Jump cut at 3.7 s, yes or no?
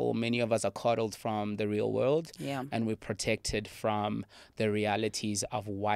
no